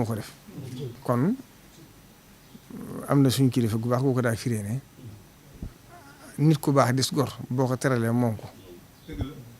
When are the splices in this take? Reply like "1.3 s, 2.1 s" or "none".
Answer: 0.9 s

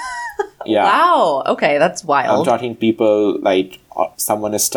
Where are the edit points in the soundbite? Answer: none

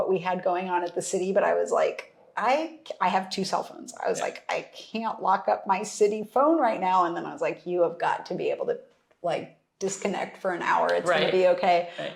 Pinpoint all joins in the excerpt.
none

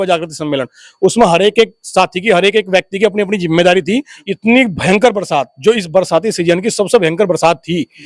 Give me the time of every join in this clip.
4.2 s

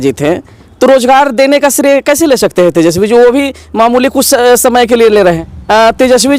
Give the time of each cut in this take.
5.5 s

